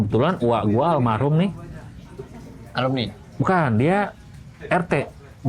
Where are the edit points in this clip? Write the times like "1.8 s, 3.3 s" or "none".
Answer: none

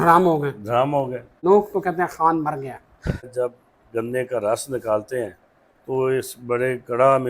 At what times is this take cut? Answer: 1.4 s, 3.3 s

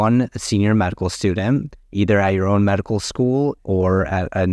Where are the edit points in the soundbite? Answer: 1.8 s, 3.6 s

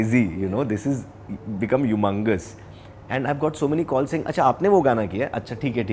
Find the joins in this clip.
none

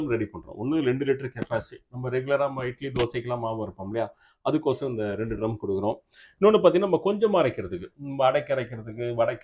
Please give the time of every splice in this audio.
none

